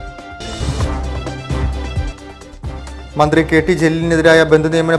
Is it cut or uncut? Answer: cut